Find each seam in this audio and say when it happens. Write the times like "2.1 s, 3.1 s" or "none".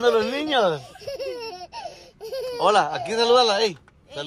none

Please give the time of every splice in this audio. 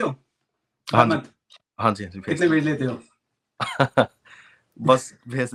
none

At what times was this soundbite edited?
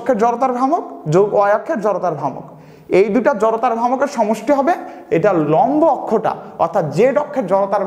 none

